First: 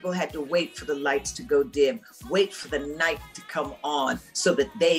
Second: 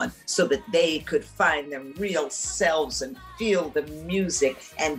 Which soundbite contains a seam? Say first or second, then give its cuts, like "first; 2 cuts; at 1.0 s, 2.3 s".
second; 1 cut; at 1.9 s